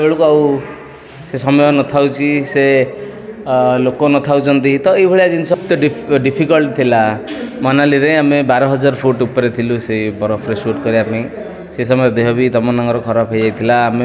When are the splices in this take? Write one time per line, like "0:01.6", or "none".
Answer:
0:05.5